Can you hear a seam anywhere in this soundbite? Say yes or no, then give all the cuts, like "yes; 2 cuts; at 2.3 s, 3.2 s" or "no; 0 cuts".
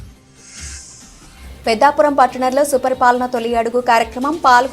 yes; 1 cut; at 1.2 s